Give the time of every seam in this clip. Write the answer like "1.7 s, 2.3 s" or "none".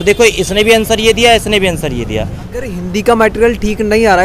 2.4 s